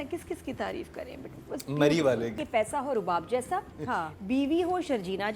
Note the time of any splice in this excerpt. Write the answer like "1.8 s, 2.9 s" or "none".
2.4 s